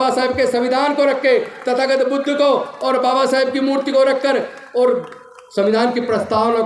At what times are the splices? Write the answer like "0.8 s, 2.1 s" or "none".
none